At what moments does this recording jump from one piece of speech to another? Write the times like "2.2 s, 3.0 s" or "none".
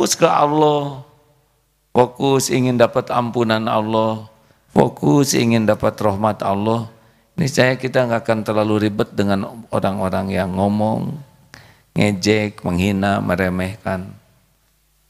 none